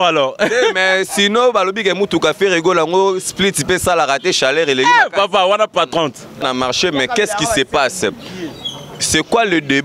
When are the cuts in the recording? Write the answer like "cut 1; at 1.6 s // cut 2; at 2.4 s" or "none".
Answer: cut 1; at 6.4 s